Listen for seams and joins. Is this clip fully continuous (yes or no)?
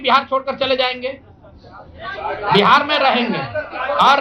yes